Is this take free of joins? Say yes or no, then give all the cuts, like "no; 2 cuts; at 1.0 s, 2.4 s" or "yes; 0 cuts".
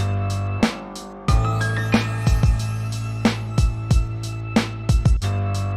no; 1 cut; at 1.1 s